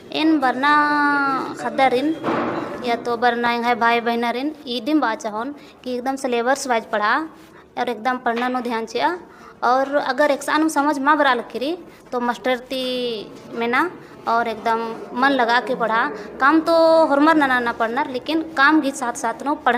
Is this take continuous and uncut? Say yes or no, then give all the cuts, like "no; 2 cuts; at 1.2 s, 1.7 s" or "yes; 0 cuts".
yes; 0 cuts